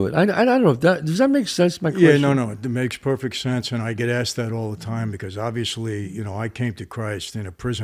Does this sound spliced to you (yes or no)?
no